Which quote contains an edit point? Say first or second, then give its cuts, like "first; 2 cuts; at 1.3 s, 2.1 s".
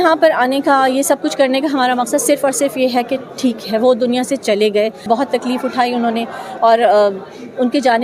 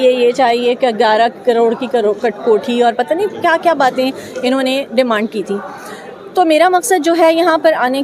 first; 1 cut; at 5.0 s